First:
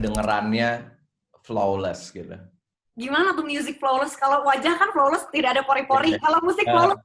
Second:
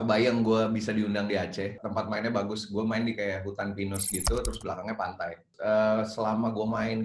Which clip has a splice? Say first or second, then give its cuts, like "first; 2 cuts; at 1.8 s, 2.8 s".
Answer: second; 2 cuts; at 1.8 s, 5.5 s